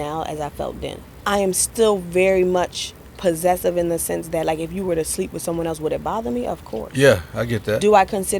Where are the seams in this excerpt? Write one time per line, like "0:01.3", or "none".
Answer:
0:01.1